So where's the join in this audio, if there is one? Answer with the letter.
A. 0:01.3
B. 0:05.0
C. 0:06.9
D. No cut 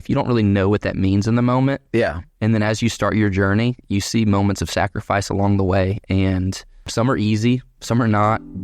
C